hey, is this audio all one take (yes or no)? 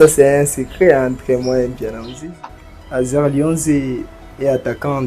no